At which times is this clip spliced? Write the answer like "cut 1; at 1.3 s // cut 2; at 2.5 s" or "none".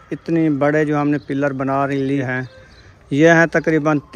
cut 1; at 2.2 s